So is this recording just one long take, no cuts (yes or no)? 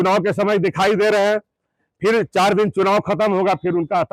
yes